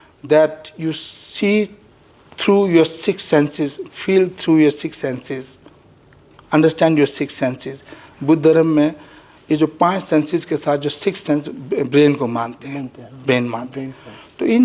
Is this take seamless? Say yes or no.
yes